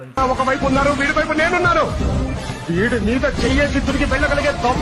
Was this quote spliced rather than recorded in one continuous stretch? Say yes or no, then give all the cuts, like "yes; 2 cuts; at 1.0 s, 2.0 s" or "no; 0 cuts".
no; 0 cuts